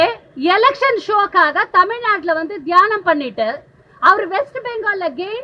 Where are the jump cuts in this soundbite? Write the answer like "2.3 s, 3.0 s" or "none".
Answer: none